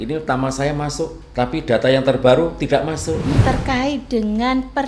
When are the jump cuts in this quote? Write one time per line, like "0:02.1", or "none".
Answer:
0:01.2
0:03.4